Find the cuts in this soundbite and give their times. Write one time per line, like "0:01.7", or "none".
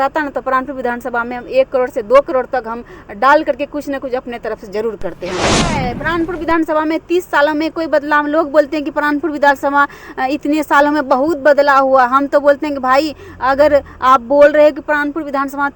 0:05.6